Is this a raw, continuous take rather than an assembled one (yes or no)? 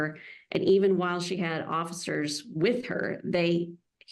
yes